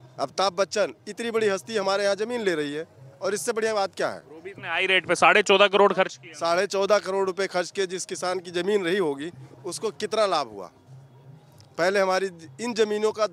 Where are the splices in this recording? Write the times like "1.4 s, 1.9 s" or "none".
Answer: none